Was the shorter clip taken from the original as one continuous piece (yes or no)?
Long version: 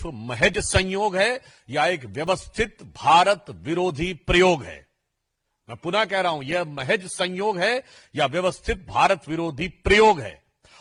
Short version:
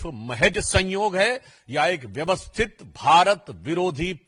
yes